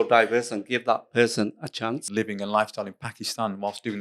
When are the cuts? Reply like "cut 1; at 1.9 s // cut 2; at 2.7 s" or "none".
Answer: cut 1; at 2.0 s